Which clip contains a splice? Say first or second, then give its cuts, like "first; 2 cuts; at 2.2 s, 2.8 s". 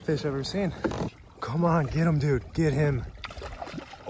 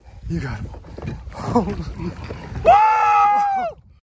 first; 1 cut; at 1.2 s